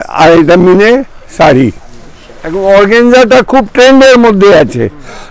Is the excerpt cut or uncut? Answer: cut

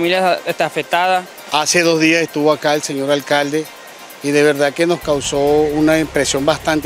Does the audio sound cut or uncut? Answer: cut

